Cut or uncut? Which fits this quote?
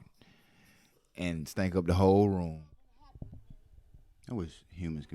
cut